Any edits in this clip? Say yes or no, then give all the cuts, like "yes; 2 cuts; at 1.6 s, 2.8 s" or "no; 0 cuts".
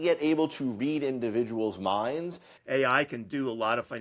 yes; 1 cut; at 2.5 s